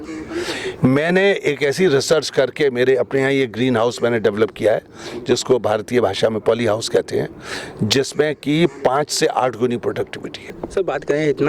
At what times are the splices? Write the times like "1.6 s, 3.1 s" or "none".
10.6 s

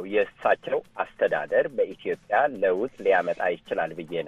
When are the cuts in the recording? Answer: none

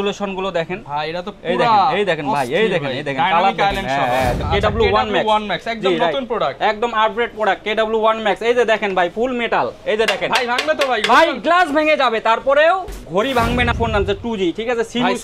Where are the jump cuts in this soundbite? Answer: 4.4 s, 13.7 s

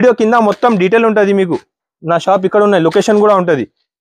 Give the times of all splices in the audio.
none

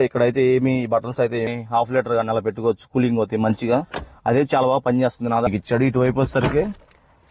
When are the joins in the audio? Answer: 1.5 s, 5.5 s

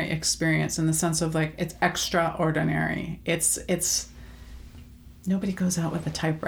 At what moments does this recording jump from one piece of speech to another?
none

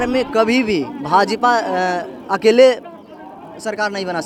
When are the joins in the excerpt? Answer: none

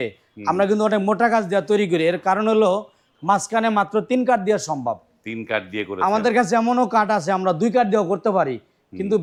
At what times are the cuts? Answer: none

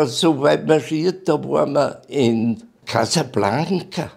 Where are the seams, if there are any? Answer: 2.7 s

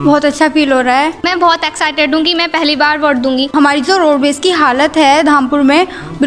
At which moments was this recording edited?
1.3 s, 3.5 s

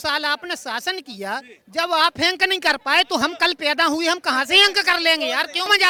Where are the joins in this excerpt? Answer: none

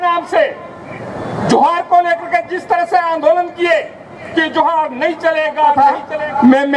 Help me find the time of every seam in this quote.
5.7 s

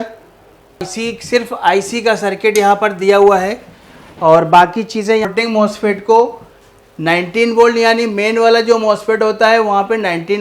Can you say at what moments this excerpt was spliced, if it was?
0.9 s, 5.2 s

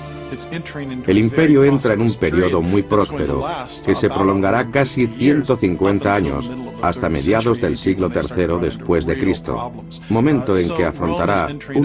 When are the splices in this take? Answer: 1.2 s

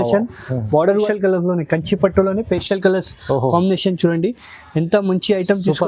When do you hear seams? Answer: 1.0 s

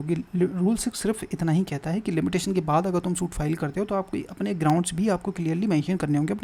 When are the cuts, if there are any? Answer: none

